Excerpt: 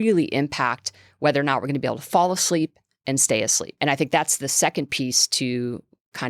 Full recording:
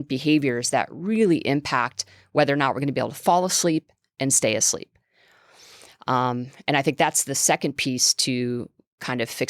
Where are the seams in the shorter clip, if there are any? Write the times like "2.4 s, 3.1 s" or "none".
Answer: 3.7 s